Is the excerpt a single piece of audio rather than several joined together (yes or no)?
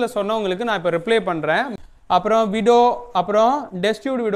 no